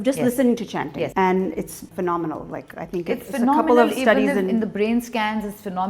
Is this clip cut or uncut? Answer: cut